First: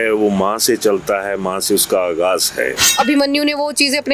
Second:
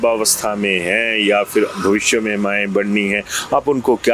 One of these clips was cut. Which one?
first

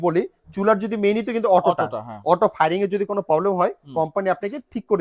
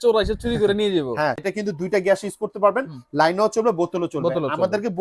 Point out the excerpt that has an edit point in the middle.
second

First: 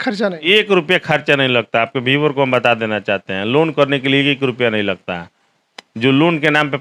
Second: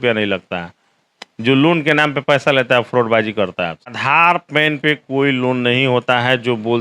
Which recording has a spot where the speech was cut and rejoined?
second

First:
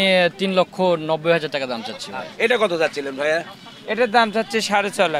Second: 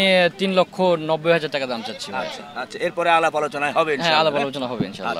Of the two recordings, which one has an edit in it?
first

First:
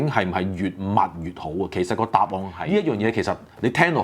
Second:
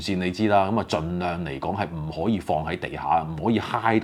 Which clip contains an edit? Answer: first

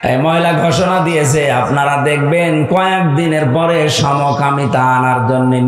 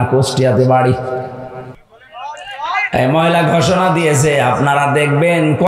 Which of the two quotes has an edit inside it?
second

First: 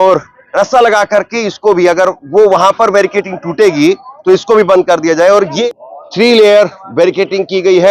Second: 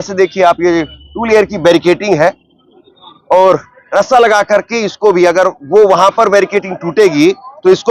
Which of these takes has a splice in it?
first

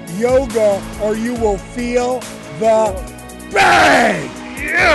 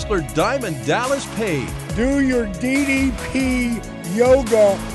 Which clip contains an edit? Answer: second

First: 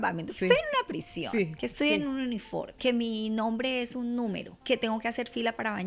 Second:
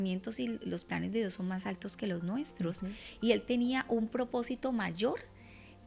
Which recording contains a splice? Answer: first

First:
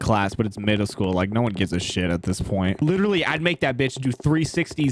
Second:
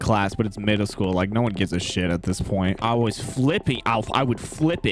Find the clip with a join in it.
first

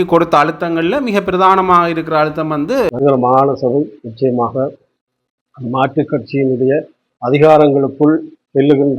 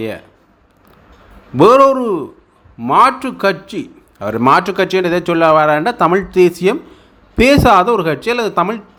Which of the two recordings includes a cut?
first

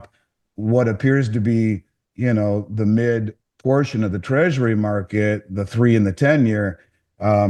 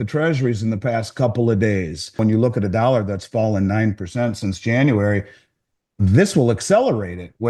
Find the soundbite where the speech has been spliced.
second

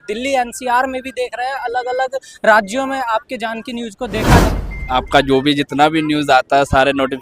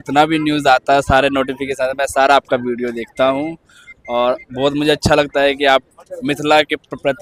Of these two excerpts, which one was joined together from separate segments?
first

